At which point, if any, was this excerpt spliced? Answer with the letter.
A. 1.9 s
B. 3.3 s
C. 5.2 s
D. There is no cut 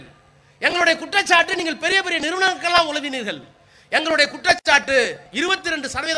C